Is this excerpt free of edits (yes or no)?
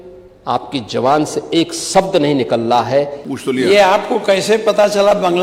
no